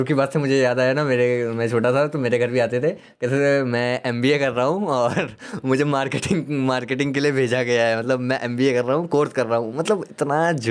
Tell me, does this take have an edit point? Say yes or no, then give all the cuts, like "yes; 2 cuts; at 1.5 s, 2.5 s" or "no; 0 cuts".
no; 0 cuts